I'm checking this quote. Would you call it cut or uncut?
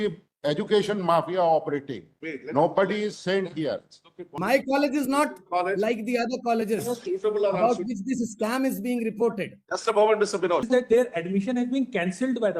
cut